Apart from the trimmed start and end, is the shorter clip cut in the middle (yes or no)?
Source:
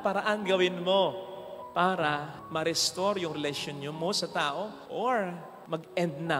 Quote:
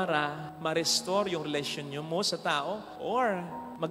no